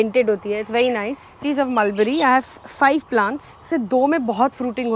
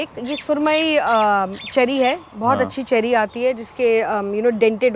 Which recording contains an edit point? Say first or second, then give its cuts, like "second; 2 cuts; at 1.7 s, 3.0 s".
first; 2 cuts; at 1.4 s, 3.7 s